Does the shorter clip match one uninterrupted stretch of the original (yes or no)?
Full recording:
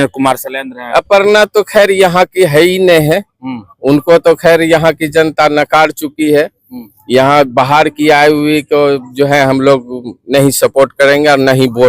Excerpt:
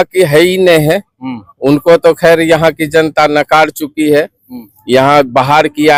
yes